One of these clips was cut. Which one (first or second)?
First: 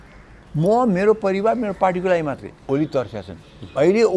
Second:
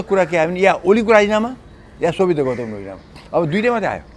first